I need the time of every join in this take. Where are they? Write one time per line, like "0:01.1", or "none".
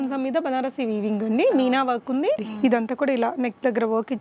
0:02.5